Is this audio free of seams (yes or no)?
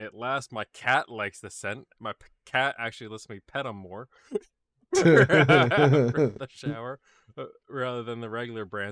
yes